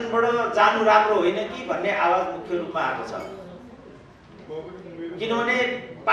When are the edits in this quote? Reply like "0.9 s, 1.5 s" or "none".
none